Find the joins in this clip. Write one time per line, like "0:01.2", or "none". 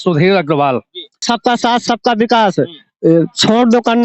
0:01.2